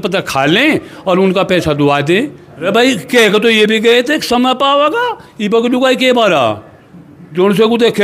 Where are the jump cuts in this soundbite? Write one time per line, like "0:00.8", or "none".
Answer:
0:02.5